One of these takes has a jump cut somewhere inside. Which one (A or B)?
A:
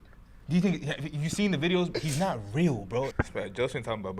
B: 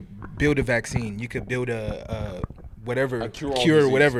A